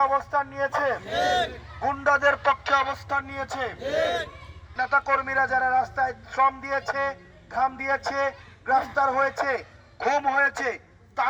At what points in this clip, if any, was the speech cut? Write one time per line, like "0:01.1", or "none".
0:04.6